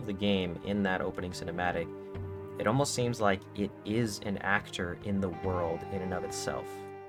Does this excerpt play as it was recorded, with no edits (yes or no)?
yes